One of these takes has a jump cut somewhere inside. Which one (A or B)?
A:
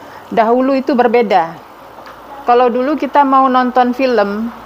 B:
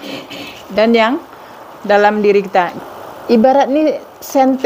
B